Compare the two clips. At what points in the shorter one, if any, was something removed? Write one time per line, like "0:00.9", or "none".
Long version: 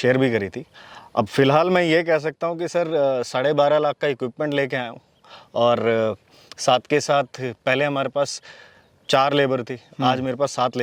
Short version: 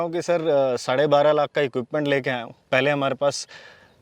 0:02.5